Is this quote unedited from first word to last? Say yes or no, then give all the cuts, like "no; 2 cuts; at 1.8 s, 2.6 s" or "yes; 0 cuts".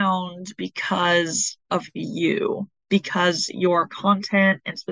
yes; 0 cuts